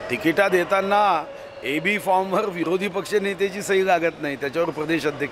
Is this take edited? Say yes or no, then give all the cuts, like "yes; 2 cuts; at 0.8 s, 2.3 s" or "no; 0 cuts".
no; 0 cuts